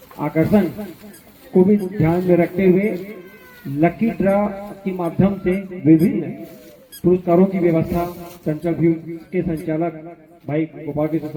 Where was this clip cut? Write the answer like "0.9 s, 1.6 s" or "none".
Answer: none